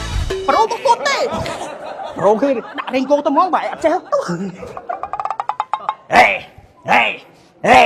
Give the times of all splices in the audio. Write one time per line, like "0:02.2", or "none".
none